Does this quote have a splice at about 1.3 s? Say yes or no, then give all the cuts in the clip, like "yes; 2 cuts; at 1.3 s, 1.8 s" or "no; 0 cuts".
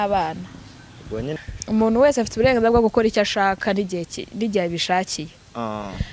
yes; 1 cut; at 1.3 s